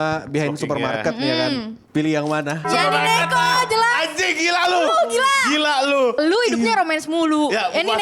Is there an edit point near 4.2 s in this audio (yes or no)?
no